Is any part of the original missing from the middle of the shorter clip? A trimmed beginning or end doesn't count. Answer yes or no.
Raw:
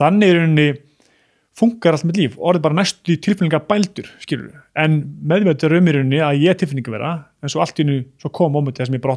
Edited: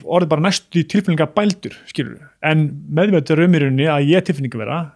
no